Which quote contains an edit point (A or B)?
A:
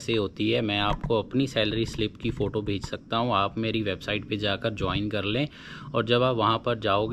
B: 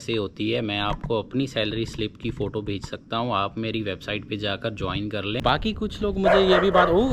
B